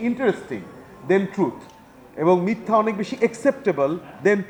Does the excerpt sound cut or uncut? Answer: uncut